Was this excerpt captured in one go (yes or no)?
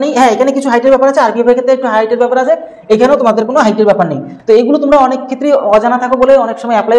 no